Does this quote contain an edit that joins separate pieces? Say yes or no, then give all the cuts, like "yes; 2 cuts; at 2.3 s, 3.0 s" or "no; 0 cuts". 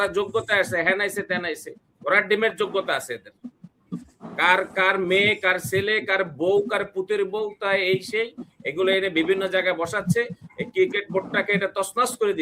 no; 0 cuts